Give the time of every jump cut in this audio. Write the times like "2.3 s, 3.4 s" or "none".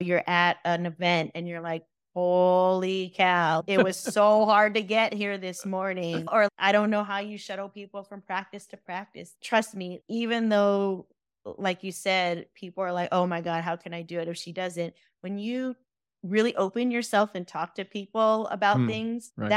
6.5 s